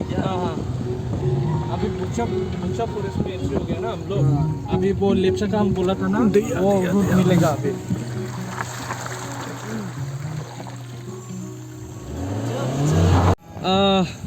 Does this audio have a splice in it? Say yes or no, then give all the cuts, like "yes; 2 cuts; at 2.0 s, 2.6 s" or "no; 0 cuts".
yes; 1 cut; at 13.3 s